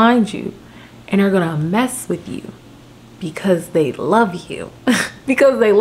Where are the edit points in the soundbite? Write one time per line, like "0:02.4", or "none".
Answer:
none